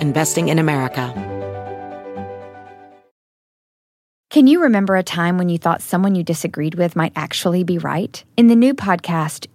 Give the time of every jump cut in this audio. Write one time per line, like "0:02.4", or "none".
0:01.1